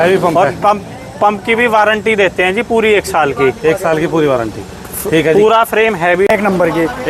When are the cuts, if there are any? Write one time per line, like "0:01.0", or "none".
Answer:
0:06.2